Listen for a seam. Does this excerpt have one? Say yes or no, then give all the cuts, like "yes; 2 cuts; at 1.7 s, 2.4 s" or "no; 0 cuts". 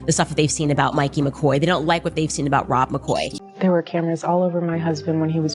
yes; 1 cut; at 3.4 s